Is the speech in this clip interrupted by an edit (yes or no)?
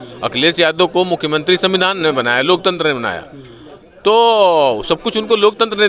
no